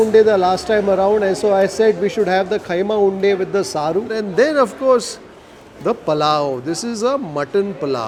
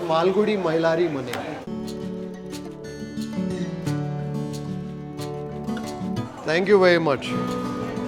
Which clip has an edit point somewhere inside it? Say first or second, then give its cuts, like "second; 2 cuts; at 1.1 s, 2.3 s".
second; 2 cuts; at 1.6 s, 6.2 s